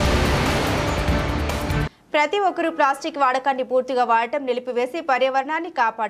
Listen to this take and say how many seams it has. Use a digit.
1